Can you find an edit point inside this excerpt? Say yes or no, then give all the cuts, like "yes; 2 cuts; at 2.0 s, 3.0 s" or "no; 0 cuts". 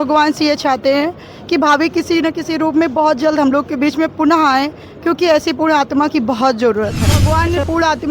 yes; 1 cut; at 7.2 s